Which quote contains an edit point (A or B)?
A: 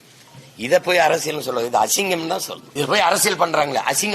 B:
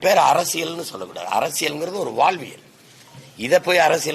A